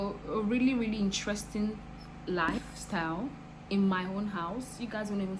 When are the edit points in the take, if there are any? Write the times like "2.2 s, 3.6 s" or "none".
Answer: 2.5 s